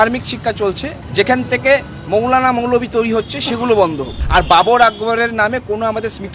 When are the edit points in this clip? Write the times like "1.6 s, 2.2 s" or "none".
0.9 s, 4.1 s